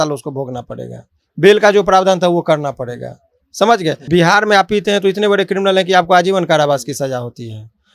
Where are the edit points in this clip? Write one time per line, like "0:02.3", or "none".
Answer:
0:04.0